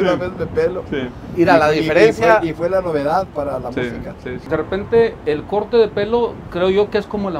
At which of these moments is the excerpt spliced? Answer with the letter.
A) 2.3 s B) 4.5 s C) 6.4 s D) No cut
B